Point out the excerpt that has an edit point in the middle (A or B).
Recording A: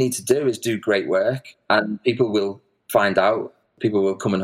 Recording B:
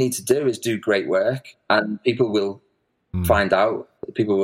A